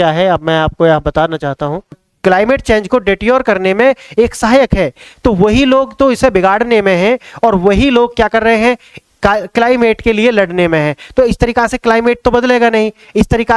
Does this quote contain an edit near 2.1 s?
yes; 1 cut; at 2.1 s

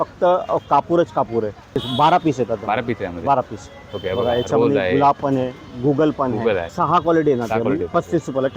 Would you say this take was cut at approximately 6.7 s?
yes; 2 cuts; at 1.8 s, 6.7 s

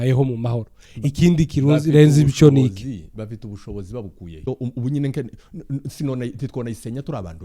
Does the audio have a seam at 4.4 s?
yes; 1 cut; at 4.4 s

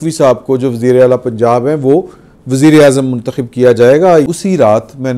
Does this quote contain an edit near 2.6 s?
no; 1 cut; at 4.3 s

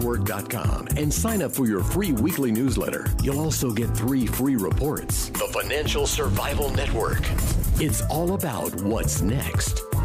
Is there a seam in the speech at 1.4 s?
no; 0 cuts

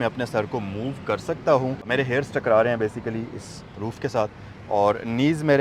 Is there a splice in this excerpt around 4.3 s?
no; 0 cuts

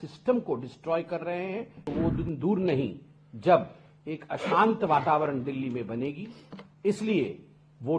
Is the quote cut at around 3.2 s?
no; 1 cut; at 1.8 s

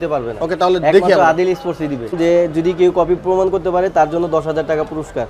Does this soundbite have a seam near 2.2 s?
yes; 1 cut; at 2.2 s

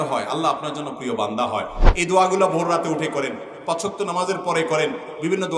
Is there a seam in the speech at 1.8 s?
yes; 1 cut; at 1.8 s

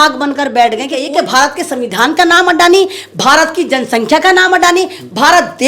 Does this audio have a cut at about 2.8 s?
no; 1 cut; at 1.1 s

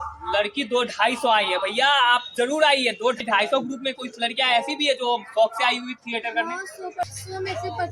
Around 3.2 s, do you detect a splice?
yes; 2 cuts; at 3.2 s, 7.0 s

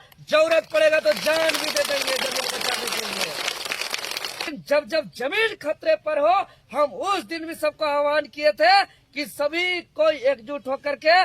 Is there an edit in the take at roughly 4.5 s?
yes; 1 cut; at 4.5 s

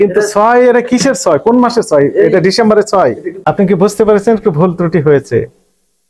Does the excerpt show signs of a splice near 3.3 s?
yes; 1 cut; at 3.3 s

